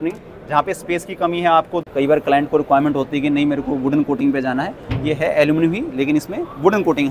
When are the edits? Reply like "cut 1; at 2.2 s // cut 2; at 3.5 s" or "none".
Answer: cut 1; at 1.8 s